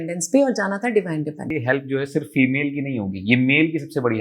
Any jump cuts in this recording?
yes; 1 cut; at 1.5 s

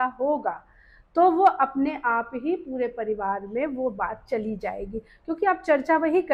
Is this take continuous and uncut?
yes; 0 cuts

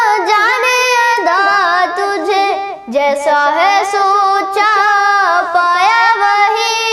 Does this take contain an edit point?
no; 0 cuts

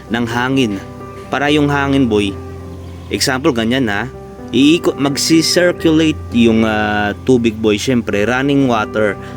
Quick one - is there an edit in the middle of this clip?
no; 0 cuts

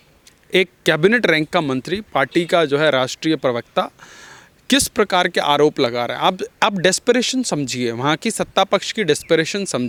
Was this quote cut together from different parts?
no; 0 cuts

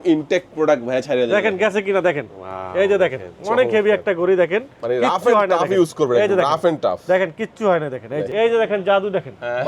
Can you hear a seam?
yes; 1 cut; at 8.3 s

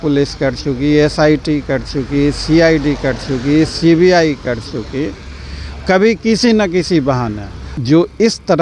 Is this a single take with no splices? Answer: no; 1 cut; at 7.7 s

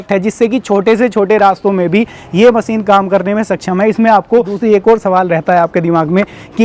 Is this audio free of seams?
no; 1 cut; at 4.5 s

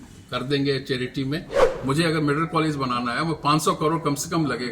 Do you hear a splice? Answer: yes; 1 cut; at 1.7 s

